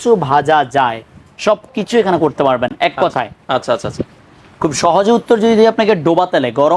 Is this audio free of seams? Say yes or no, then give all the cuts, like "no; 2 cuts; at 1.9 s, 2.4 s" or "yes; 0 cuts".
yes; 0 cuts